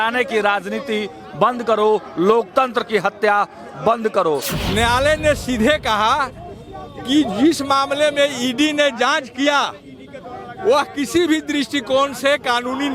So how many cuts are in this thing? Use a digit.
1